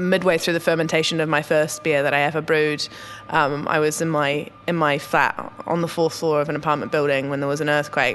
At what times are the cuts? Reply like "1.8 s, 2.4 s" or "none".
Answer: none